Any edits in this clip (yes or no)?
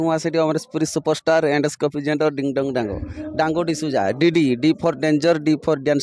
no